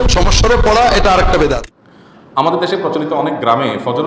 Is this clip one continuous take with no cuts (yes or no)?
yes